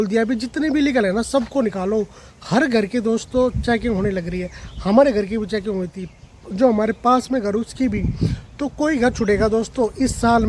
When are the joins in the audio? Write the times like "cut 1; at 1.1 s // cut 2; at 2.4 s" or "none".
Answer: none